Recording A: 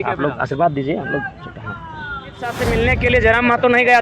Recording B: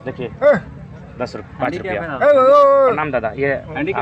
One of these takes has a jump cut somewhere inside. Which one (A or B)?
A